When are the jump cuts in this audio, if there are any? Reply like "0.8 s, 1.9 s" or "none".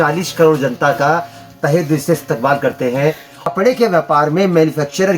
3.4 s